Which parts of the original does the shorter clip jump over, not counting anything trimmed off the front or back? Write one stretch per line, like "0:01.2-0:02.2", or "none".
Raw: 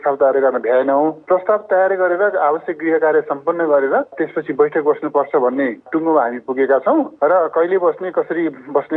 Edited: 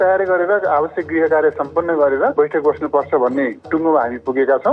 0:04.0-0:04.5